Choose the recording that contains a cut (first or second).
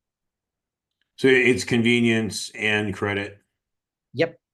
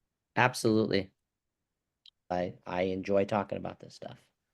second